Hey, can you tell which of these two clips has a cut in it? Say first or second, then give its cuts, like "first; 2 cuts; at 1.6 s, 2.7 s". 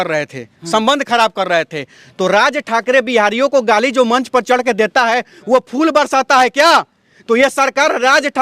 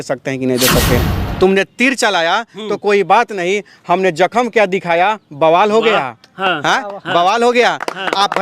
second; 1 cut; at 1.1 s